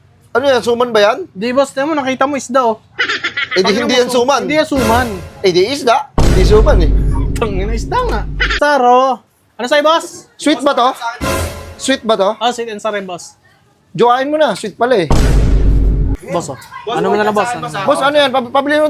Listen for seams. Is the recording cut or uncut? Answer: cut